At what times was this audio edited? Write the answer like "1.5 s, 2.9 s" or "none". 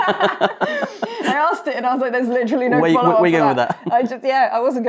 none

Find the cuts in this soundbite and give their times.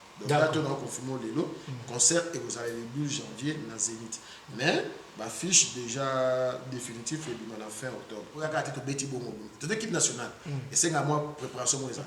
8.3 s

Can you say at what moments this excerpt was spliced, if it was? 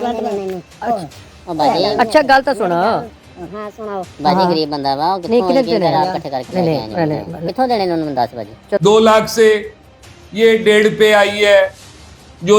8.8 s

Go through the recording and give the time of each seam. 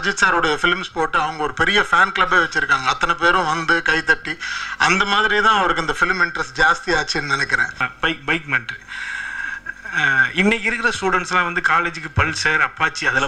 7.9 s

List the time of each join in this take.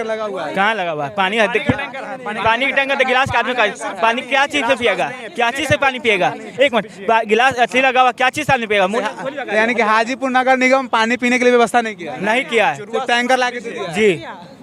none

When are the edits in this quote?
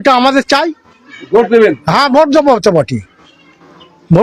none

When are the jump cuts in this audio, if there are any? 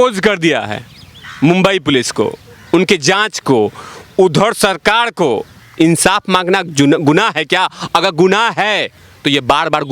5.6 s

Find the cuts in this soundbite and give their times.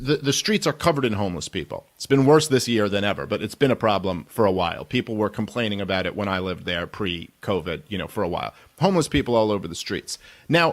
5.1 s

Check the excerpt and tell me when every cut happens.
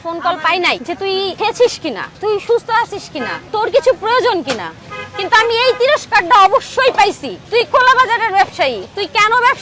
1.0 s

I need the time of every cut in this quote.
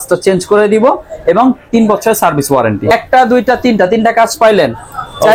2.9 s

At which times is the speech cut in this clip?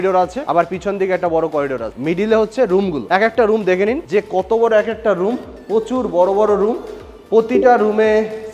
none

